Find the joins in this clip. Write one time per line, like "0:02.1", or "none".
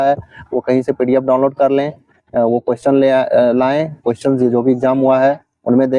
none